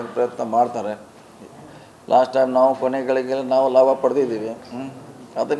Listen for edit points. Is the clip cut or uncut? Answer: uncut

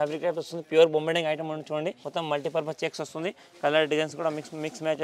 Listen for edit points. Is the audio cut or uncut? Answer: cut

